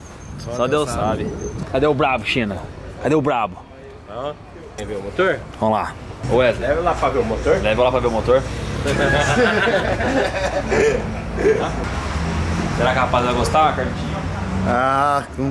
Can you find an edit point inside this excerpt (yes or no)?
yes